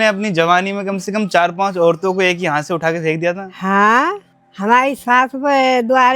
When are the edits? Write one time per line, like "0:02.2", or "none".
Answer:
none